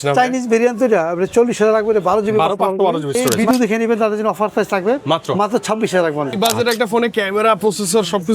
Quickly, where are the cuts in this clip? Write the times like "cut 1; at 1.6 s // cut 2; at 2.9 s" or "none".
cut 1; at 3.2 s // cut 2; at 6.4 s